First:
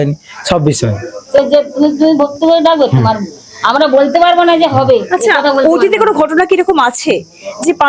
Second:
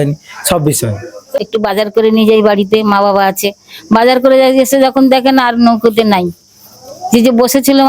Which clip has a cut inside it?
second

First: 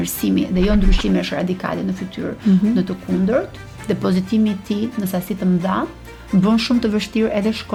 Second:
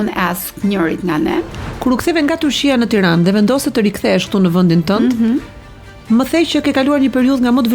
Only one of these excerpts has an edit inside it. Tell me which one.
second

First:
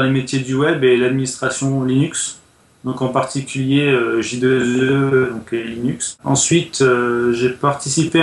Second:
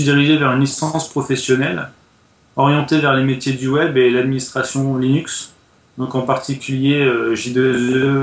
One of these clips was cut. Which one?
first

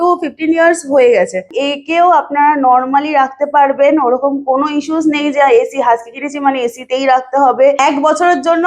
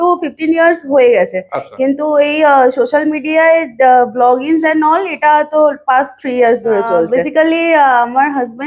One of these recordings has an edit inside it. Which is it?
first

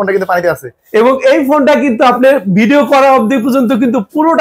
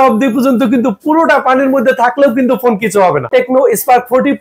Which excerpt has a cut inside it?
second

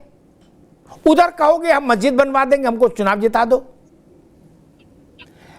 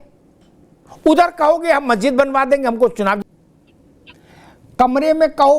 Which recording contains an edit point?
second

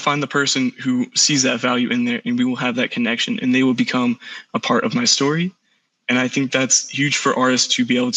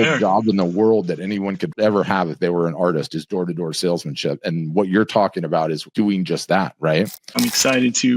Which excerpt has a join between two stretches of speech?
second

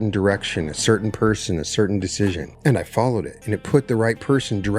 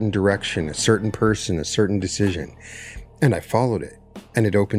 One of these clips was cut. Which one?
first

